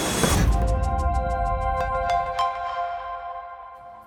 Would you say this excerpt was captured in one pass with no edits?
yes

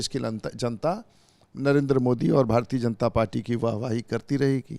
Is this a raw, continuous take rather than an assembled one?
yes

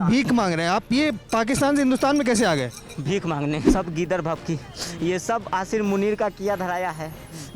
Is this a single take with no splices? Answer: no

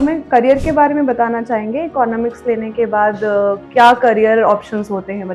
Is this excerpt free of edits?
yes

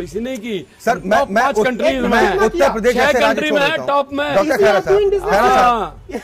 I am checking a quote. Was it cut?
no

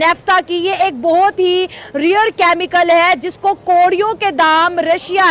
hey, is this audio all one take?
yes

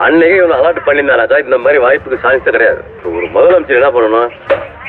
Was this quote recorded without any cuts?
no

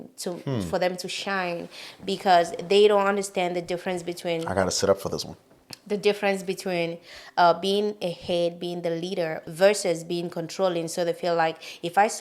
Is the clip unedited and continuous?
yes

